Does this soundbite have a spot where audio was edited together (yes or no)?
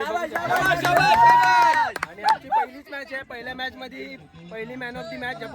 no